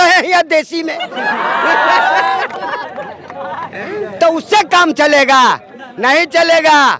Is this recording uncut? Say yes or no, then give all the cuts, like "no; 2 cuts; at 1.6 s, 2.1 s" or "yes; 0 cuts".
yes; 0 cuts